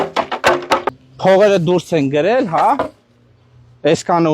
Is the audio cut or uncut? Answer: cut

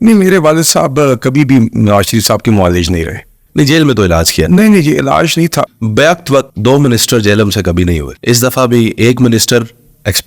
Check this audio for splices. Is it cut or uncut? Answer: cut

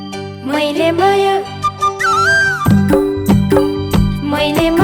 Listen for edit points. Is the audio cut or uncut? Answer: uncut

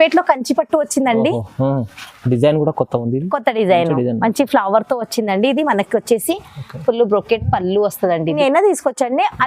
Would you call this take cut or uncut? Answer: cut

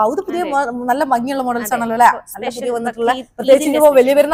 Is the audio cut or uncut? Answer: uncut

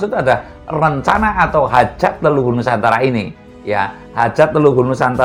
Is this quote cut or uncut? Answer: uncut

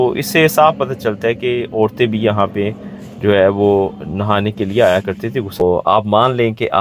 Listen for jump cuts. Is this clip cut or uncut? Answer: cut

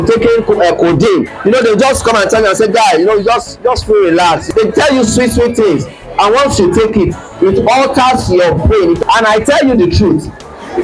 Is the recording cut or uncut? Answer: cut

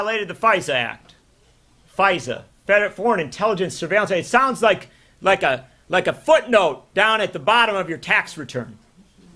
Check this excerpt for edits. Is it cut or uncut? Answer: uncut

